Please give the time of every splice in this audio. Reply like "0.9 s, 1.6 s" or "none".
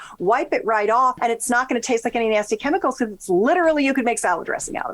1.2 s